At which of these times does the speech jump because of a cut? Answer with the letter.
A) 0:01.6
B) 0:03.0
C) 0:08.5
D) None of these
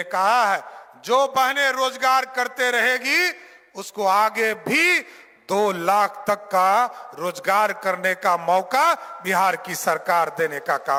D